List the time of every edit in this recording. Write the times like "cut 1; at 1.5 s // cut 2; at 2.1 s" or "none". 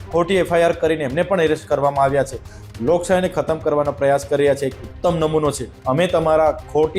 cut 1; at 2.6 s // cut 2; at 5.7 s